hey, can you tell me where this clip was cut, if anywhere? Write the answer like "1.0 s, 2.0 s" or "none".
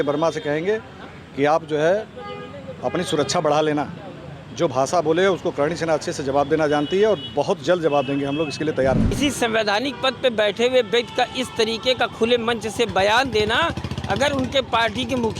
9.2 s